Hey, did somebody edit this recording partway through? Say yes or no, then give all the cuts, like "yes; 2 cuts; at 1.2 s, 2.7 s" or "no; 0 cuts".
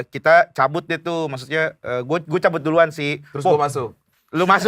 no; 0 cuts